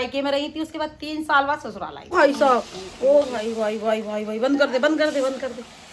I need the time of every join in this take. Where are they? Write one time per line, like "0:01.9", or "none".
0:02.1